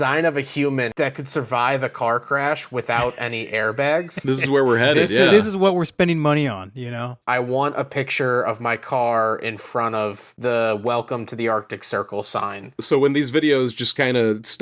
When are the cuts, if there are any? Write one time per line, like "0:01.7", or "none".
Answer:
0:00.9
0:05.1
0:07.1
0:12.8

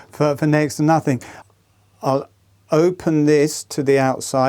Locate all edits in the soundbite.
0:01.3

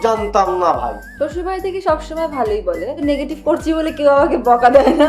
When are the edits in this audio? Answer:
0:01.0
0:03.0

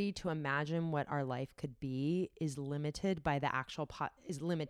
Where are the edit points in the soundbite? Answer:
none

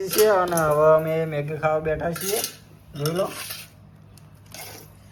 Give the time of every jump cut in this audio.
none

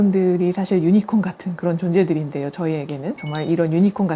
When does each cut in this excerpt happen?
none

